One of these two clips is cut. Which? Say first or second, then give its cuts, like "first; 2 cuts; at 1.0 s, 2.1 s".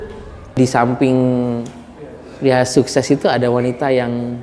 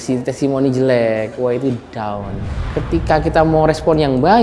second; 1 cut; at 2.6 s